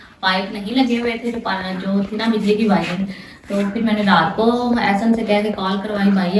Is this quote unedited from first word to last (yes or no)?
yes